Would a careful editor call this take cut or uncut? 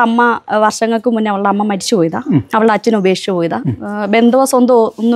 uncut